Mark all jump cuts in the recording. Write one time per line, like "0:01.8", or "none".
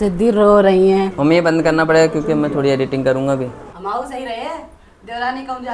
0:01.1
0:03.7